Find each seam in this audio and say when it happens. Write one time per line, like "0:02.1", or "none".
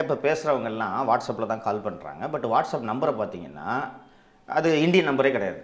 none